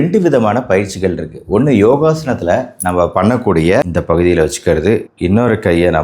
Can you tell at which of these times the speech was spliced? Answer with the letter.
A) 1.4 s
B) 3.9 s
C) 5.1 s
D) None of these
B